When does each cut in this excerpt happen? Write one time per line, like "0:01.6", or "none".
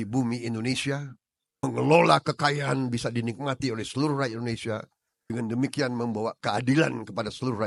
none